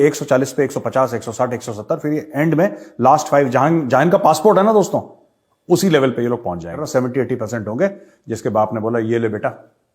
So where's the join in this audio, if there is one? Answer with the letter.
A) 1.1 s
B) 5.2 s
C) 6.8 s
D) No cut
C